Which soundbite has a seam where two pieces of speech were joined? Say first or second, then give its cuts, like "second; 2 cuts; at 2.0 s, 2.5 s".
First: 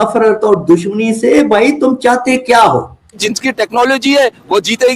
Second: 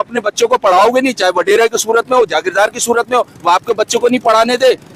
first; 1 cut; at 3.3 s